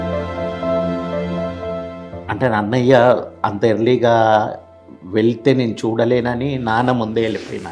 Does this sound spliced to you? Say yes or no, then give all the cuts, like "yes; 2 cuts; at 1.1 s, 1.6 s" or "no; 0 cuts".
yes; 1 cut; at 1.9 s